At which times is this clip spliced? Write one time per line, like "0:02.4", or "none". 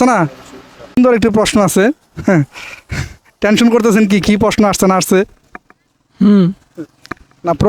0:01.0